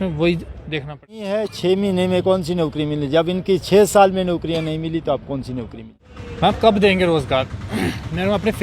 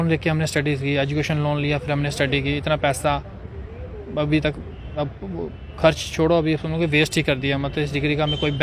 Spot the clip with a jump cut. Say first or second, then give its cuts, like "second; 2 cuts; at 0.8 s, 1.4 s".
first; 2 cuts; at 1.5 s, 5.8 s